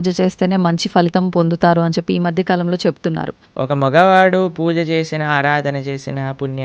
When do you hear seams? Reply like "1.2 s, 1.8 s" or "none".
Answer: 3.4 s

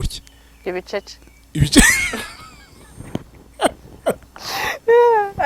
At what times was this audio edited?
none

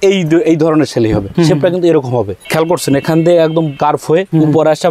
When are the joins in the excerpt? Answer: 1.3 s, 2.5 s, 4.1 s

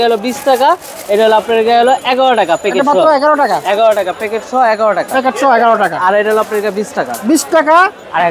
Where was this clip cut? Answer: none

